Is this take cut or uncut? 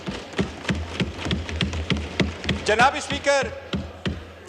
uncut